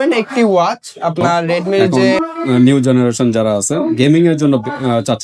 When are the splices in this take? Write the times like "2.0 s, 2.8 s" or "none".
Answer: 2.0 s